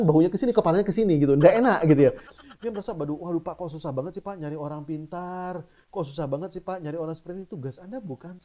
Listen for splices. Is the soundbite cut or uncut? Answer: cut